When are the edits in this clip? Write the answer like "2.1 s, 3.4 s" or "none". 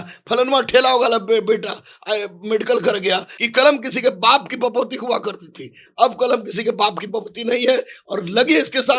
3.3 s